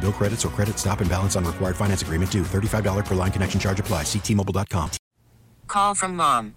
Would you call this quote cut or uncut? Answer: cut